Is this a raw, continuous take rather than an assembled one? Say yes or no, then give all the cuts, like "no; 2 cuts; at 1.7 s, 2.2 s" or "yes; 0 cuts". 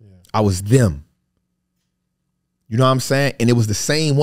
yes; 0 cuts